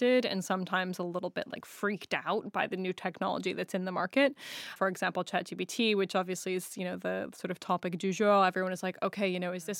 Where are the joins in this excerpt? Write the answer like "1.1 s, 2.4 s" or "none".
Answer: 4.7 s